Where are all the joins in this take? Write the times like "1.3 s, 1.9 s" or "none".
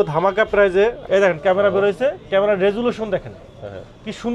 1.0 s